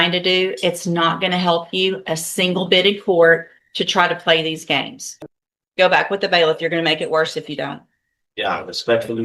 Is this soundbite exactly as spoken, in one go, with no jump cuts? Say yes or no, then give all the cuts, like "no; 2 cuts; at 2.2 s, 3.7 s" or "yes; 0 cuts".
no; 1 cut; at 5.0 s